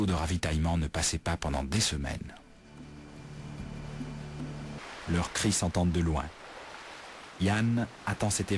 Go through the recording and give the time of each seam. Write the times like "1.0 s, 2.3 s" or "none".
4.8 s